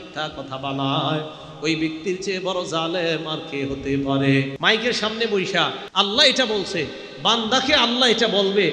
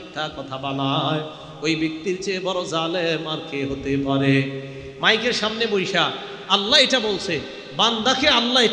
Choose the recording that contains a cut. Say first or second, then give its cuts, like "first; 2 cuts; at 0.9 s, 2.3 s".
first; 2 cuts; at 4.5 s, 5.8 s